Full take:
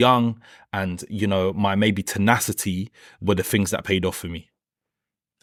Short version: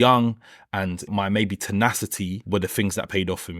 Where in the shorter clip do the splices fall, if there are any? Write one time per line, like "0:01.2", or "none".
0:01.1
0:02.4

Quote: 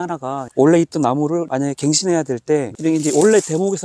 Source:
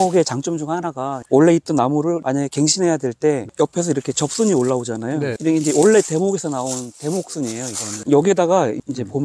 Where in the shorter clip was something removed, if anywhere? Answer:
0:02.7

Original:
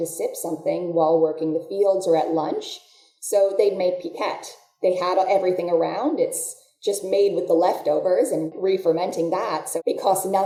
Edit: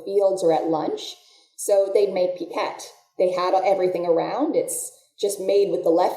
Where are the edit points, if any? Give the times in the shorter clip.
none

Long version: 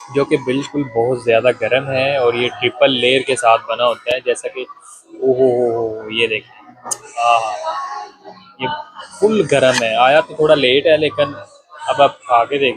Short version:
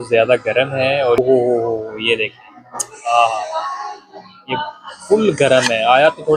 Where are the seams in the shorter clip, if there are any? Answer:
0:01.2

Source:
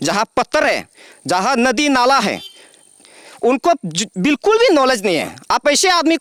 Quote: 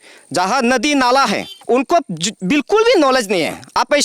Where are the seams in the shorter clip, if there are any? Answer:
0:01.5

